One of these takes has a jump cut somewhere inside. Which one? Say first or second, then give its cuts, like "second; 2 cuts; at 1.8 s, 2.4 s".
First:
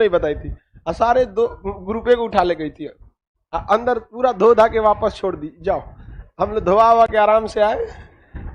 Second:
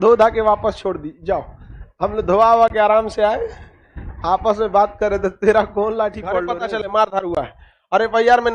second; 1 cut; at 6.4 s